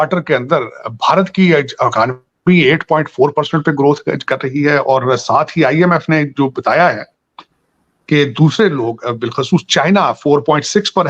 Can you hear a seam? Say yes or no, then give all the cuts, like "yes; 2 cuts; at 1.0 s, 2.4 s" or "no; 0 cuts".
no; 0 cuts